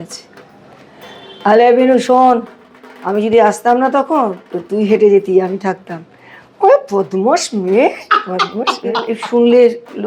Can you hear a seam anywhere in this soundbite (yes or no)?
yes